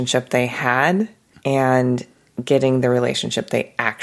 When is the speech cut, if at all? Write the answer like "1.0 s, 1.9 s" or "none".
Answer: 1.3 s